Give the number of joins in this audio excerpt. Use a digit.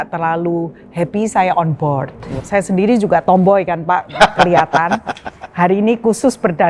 1